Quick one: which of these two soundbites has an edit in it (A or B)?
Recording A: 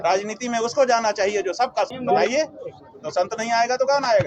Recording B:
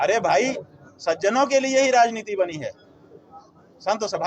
A